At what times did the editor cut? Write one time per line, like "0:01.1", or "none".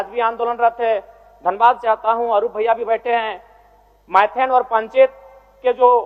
none